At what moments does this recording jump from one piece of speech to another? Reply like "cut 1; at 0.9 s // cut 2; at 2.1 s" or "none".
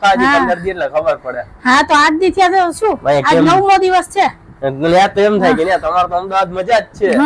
none